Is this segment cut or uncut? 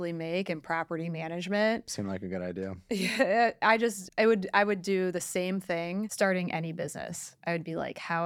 uncut